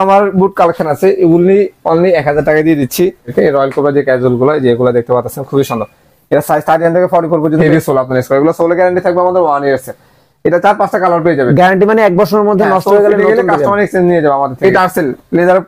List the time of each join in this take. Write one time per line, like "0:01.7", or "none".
0:03.3
0:07.6
0:14.6